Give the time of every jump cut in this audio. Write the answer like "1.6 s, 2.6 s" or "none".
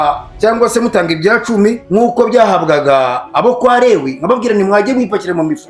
1.8 s